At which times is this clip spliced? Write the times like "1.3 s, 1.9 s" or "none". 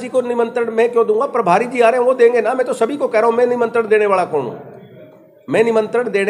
none